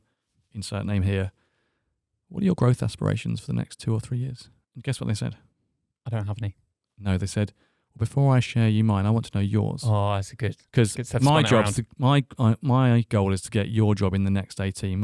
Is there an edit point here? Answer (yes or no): no